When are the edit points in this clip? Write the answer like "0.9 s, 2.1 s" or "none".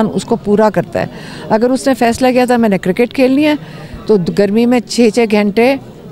none

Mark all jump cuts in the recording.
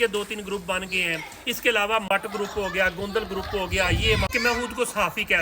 2.1 s, 4.3 s

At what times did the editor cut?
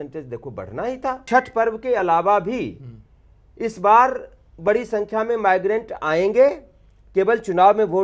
1.2 s

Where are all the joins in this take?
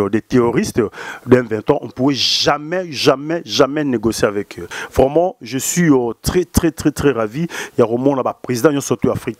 4.8 s

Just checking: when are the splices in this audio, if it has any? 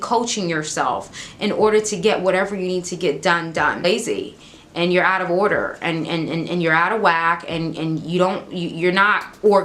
3.8 s

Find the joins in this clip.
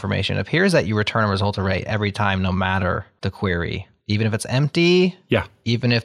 3.1 s

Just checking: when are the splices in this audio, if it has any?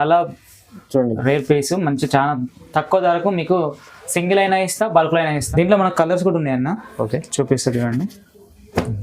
5.4 s

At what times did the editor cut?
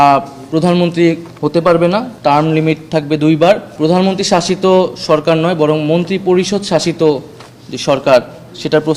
3.7 s

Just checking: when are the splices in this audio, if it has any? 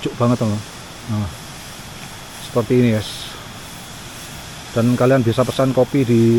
none

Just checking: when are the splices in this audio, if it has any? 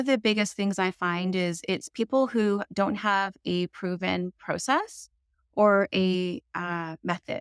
none

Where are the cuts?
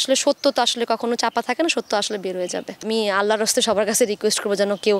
2.9 s

